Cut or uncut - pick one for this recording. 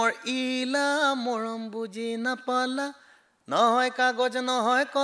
uncut